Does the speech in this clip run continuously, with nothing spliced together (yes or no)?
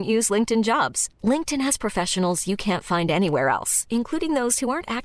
yes